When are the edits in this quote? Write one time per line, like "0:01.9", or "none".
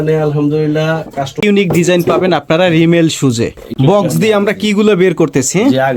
0:01.4